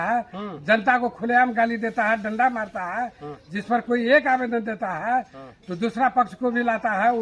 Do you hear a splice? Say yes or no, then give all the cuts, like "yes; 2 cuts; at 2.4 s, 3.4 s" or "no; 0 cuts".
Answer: no; 0 cuts